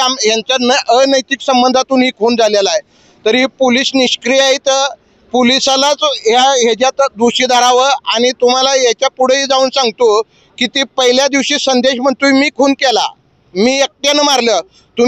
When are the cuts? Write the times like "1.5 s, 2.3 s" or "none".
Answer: none